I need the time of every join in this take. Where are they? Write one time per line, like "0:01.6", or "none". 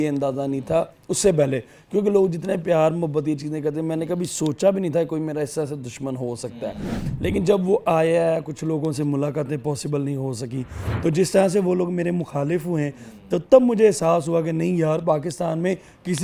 none